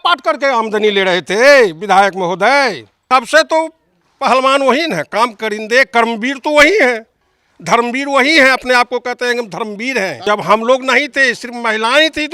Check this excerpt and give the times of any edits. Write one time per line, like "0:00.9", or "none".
0:02.9
0:10.2